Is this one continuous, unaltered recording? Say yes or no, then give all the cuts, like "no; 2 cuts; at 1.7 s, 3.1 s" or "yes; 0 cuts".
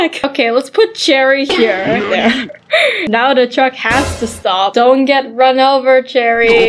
yes; 0 cuts